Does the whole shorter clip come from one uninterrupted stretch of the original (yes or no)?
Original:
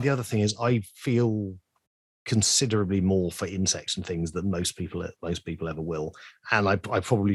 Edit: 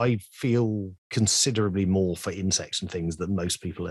no